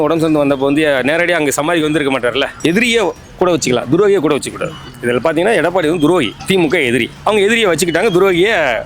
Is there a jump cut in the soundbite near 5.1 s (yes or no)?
no